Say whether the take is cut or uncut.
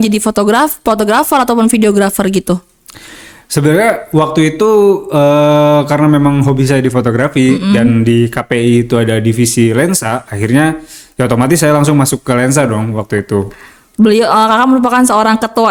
uncut